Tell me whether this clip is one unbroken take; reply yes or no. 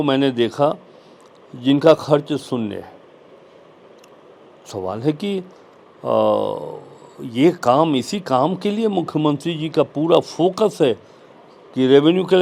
yes